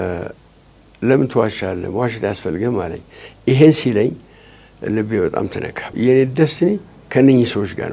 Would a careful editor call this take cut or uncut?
cut